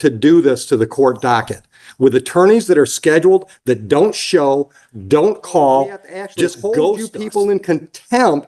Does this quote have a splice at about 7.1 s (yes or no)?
yes